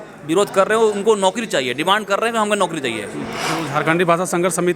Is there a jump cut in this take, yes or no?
yes